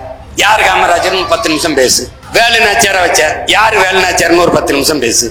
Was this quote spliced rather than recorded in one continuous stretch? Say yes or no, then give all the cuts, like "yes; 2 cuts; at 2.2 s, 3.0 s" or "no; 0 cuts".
yes; 1 cut; at 2.1 s